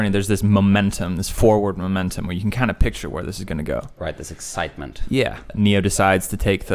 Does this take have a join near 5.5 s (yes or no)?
yes